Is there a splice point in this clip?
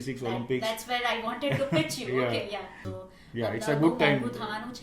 yes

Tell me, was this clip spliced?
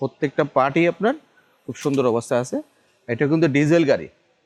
no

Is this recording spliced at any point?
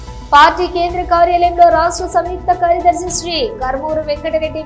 no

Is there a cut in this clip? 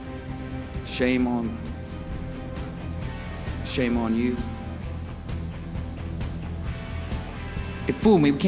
no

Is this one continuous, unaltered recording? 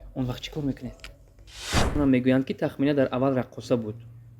no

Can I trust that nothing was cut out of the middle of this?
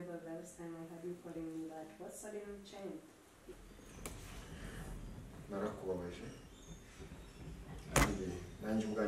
no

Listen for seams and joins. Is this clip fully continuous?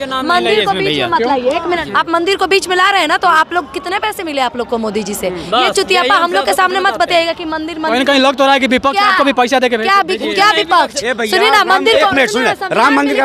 no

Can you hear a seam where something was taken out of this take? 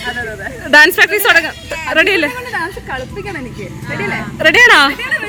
no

